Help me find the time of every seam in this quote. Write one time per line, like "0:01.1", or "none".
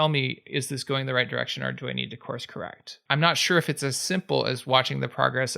0:02.9